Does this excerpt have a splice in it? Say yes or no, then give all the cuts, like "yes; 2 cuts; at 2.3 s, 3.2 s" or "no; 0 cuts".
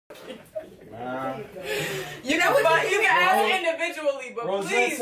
no; 0 cuts